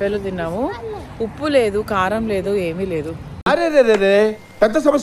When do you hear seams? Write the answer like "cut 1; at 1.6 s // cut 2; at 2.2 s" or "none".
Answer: none